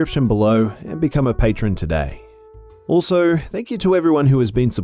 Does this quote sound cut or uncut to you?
cut